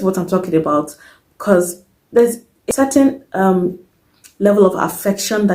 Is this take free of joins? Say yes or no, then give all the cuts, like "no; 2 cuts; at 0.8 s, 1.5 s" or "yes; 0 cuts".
no; 1 cut; at 2.6 s